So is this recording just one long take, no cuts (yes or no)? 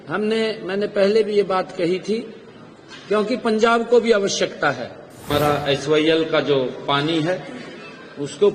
no